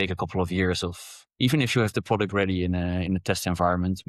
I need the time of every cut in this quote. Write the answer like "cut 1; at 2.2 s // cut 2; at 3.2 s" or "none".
none